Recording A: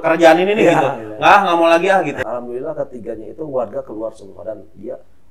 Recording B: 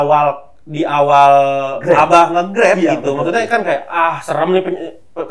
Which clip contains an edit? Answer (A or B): A